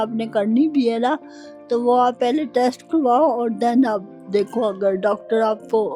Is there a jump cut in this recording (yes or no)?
no